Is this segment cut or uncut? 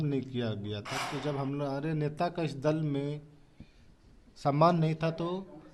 uncut